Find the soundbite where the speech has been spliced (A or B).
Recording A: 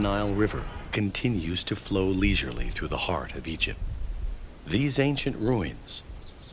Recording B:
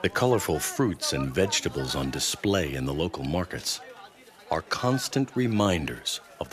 A